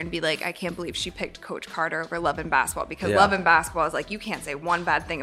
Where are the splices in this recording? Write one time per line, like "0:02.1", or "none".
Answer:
none